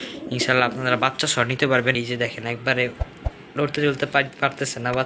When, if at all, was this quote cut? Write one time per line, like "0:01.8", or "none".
0:01.9